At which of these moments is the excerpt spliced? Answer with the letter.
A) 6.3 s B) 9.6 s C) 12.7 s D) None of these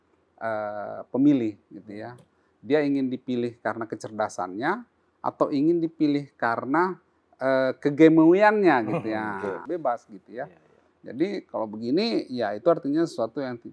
B